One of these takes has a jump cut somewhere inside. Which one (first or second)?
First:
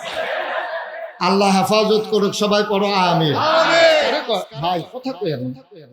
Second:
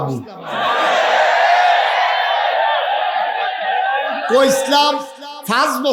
first